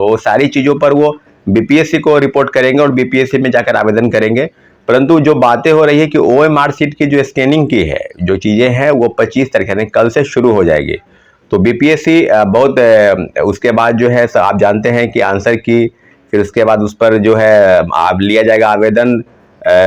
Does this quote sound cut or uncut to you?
uncut